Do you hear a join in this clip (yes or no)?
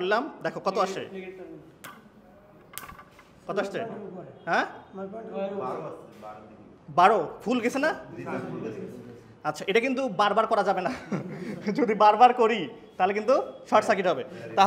no